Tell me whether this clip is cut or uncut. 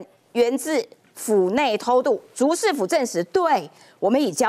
uncut